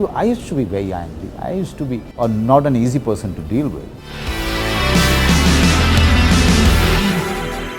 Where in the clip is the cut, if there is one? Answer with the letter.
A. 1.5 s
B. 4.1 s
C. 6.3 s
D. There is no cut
B